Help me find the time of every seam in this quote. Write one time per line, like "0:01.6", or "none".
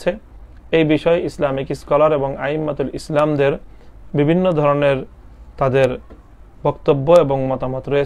none